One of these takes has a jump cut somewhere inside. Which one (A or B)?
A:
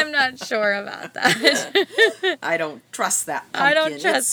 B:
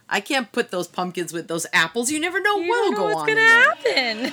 B